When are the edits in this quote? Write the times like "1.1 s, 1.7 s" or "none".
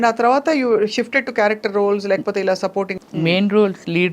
2.9 s